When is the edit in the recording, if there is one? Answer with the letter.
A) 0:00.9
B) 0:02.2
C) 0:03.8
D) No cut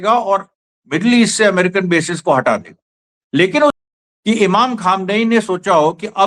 C